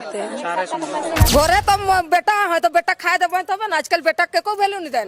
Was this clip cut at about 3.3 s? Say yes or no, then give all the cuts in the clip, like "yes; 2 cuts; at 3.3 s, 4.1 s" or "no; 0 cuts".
no; 1 cut; at 1.3 s